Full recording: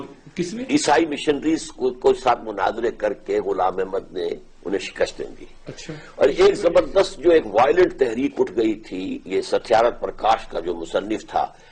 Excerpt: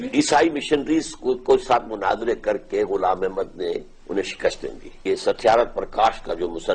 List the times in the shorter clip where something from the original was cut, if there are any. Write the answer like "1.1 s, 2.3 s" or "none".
4.9 s